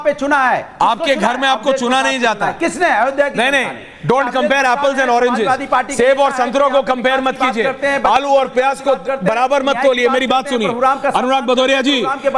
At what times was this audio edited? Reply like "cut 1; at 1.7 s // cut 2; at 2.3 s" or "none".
none

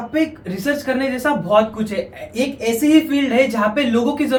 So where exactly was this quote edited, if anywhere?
none

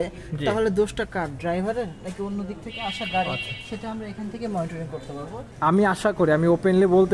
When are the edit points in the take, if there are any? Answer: cut 1; at 5.4 s

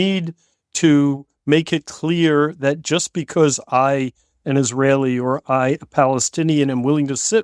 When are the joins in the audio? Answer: none

